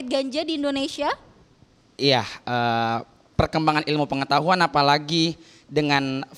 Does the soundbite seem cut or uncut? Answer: uncut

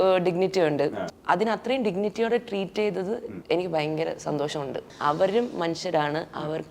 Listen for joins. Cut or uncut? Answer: cut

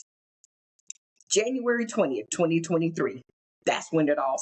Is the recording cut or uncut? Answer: uncut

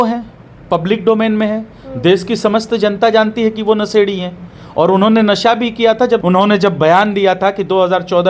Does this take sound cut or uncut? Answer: cut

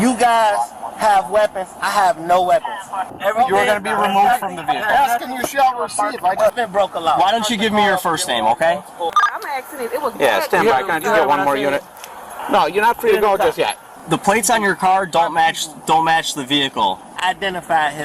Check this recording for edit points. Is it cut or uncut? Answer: cut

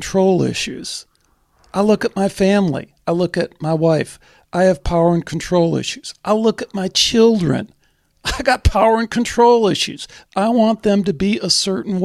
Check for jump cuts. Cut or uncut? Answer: uncut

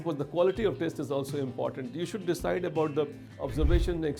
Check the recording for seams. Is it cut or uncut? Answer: uncut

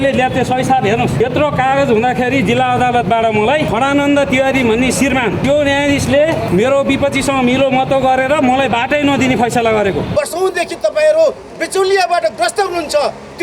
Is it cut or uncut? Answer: cut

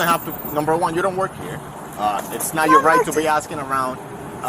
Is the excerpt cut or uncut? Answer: uncut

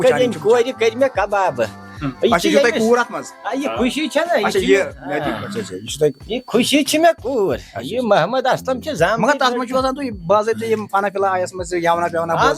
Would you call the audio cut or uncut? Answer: uncut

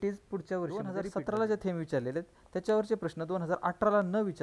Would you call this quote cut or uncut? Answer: cut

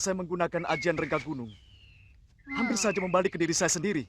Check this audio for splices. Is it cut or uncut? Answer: uncut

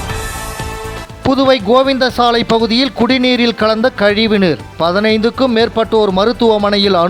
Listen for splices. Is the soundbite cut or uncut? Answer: cut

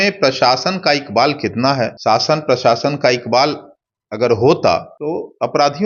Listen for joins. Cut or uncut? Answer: cut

